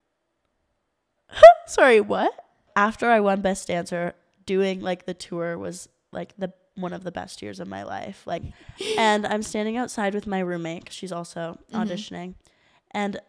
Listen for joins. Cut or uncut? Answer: cut